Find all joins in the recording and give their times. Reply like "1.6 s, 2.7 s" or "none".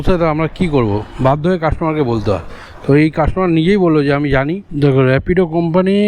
4.6 s